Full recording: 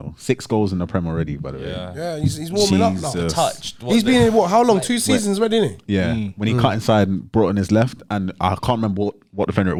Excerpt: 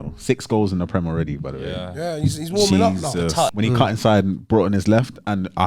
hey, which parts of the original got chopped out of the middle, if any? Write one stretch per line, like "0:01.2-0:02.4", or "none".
0:03.6-0:06.4